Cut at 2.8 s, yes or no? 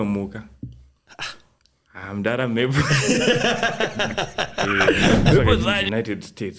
no